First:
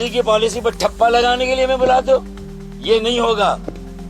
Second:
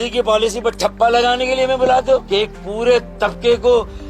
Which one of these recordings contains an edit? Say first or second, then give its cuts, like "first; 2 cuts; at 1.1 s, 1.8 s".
second; 1 cut; at 2.2 s